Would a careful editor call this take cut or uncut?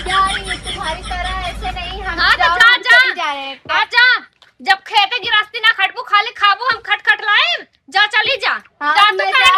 uncut